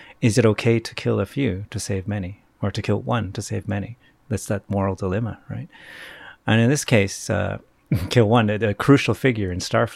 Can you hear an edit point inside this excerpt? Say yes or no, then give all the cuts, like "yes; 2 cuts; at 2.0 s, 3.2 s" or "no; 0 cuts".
no; 0 cuts